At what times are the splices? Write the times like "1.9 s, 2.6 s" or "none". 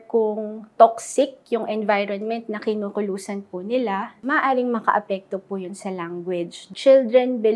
4.2 s, 6.6 s

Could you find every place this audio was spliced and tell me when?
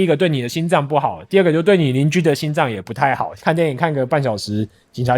3.3 s

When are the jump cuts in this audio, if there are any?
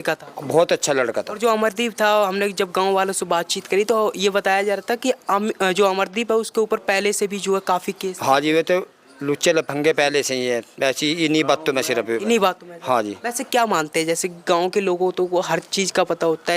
none

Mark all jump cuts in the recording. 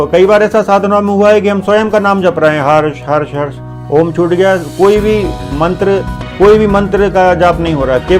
6.2 s

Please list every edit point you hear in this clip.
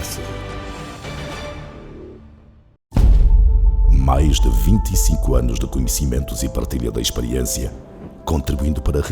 2.9 s

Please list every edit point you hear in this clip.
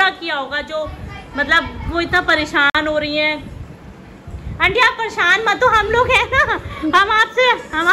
none

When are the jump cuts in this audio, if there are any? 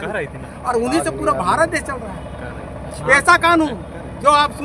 none

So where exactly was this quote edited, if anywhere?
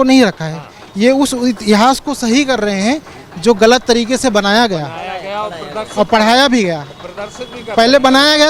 none

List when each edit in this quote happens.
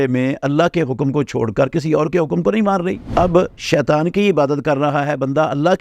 3.0 s

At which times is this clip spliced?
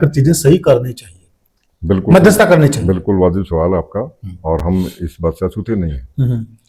none

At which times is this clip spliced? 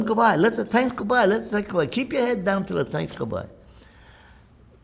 none

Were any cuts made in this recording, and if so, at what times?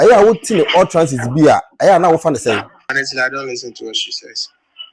2.9 s

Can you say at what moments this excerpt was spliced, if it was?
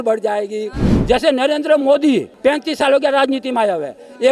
0.9 s, 2.3 s

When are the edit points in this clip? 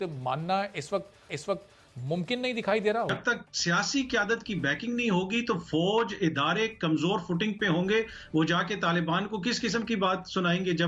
3.1 s

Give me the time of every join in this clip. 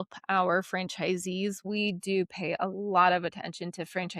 1.6 s

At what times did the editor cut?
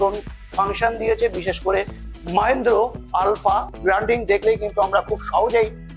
3.7 s

